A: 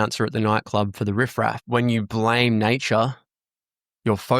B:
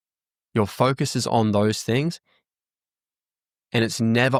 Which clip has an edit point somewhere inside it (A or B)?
A